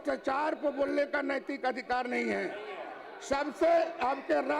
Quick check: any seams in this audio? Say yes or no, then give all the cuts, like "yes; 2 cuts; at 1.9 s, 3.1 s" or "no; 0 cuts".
no; 0 cuts